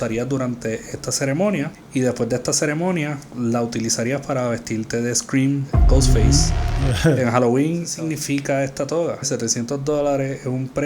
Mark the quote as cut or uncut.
cut